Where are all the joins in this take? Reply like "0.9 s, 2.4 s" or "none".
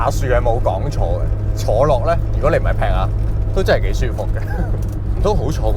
none